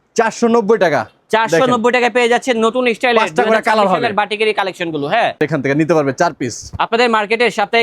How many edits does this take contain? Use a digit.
1